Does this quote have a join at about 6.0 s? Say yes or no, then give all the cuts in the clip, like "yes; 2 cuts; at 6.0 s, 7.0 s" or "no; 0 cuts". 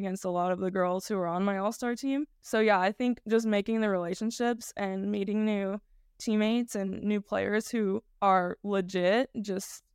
no; 2 cuts; at 2.4 s, 8.1 s